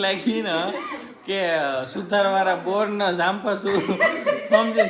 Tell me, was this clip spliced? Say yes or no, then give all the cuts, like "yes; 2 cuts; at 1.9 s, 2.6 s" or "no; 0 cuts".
no; 0 cuts